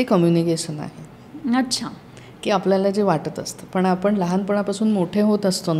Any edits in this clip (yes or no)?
no